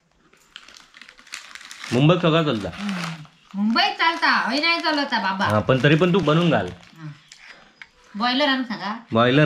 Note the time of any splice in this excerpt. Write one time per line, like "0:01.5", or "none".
0:06.2

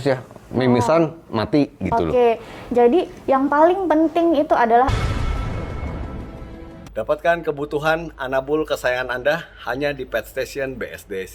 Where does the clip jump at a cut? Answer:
none

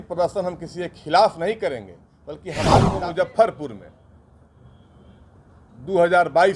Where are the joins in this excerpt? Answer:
0:02.9

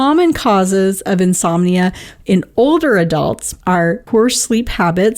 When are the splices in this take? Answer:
0:03.8

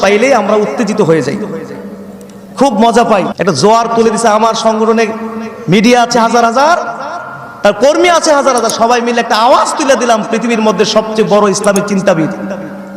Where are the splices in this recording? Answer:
0:03.3

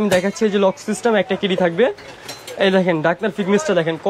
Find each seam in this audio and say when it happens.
none

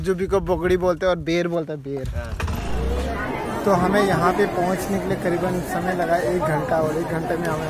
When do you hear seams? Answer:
0:02.8

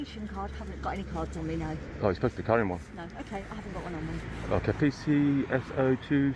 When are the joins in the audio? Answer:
none

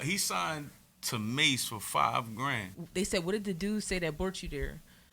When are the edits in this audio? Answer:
0:02.7

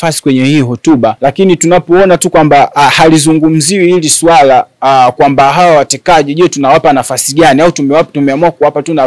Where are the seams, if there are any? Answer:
0:01.2

